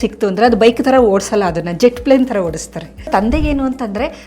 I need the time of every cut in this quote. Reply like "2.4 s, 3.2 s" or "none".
3.1 s

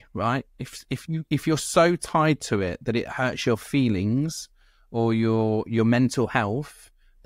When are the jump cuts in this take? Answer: none

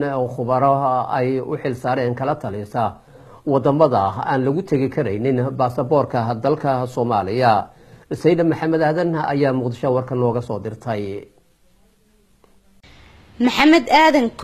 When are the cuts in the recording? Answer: none

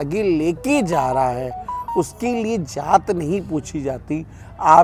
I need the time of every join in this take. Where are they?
none

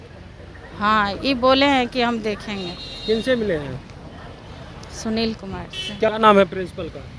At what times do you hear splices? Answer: 6.1 s

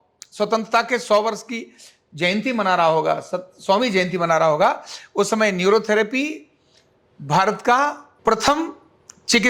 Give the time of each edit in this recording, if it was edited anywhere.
8.1 s

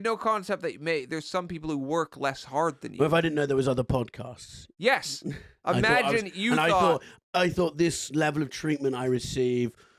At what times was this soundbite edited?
none

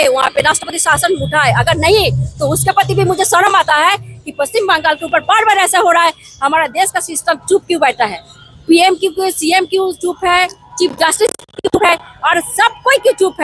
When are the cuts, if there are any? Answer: none

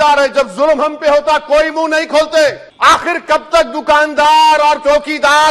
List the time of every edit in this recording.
2.7 s

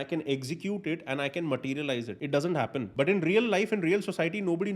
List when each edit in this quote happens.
2.2 s, 2.9 s

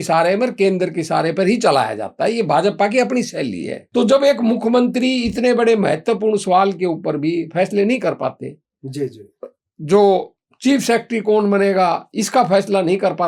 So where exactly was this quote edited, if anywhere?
3.7 s

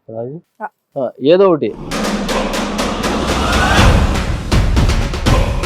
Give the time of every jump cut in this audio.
1.8 s

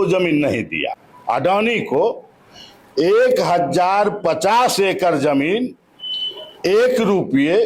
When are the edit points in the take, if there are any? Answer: 1.1 s

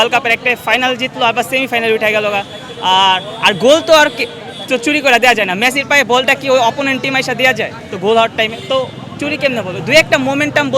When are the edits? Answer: none

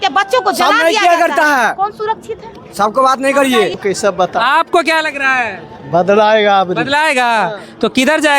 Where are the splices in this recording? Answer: 3.7 s

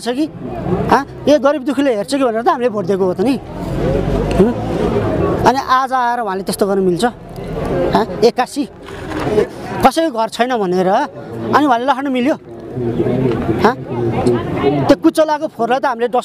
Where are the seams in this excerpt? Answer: 9.4 s

